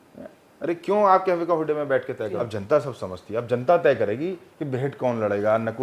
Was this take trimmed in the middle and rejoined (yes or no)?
yes